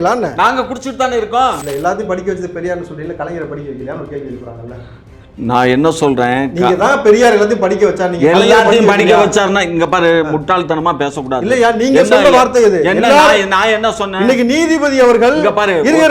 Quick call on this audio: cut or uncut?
cut